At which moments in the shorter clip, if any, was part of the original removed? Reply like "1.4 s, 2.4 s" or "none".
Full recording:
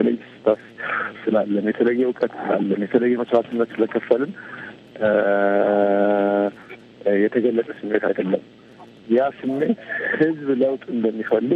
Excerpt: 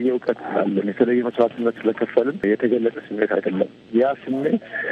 2.4 s, 3.8 s